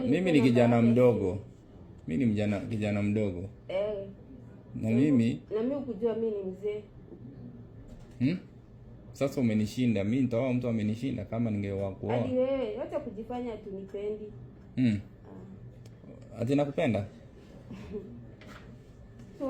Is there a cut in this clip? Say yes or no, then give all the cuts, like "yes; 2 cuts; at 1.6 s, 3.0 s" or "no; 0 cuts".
no; 0 cuts